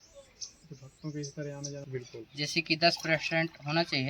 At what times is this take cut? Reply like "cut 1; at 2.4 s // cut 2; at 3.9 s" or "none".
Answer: cut 1; at 1.8 s